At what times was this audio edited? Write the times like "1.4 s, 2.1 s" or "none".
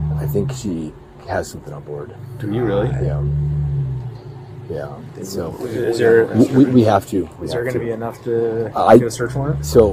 none